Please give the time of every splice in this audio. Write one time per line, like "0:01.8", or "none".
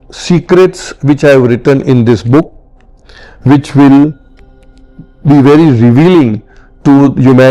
none